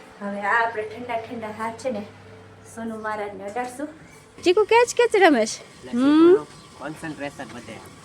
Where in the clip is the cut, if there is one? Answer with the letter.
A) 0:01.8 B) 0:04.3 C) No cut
B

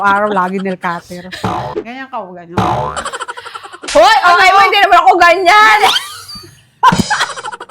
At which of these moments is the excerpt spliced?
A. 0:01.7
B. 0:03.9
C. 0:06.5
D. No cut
A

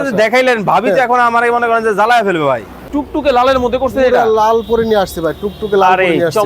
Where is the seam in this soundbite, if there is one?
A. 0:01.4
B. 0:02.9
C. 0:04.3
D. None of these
B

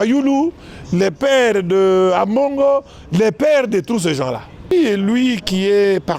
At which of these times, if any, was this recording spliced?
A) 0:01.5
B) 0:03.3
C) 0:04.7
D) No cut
C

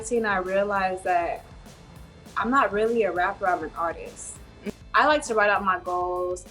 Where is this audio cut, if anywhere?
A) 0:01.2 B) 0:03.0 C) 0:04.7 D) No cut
C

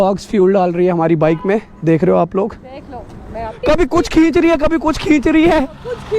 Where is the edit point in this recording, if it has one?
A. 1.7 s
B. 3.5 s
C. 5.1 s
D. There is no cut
B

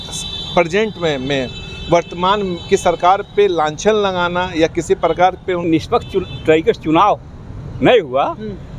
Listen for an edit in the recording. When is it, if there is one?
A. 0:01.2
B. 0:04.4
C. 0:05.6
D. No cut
C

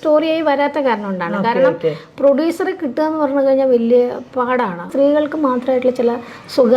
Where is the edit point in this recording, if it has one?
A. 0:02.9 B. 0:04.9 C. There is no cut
B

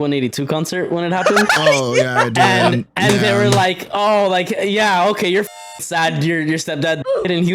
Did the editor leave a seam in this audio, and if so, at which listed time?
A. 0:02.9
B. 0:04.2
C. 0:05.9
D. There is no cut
D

